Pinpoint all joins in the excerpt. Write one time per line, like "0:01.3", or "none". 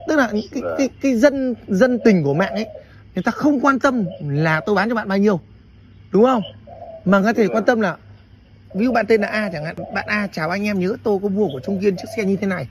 0:09.9

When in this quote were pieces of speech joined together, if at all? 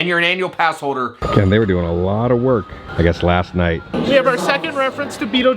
0:01.2
0:03.9

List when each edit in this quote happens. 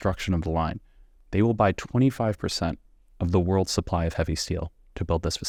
none

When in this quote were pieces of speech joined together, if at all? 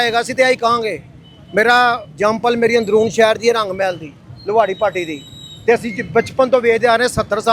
none

